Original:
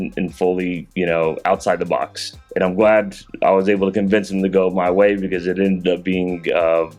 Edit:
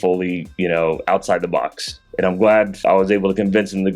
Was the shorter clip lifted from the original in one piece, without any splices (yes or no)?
no